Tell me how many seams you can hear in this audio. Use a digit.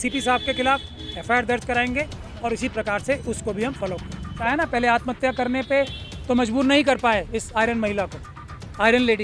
1